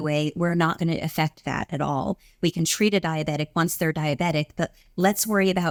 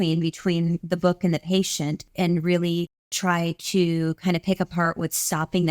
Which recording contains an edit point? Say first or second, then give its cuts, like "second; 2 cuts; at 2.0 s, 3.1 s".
second; 1 cut; at 2.0 s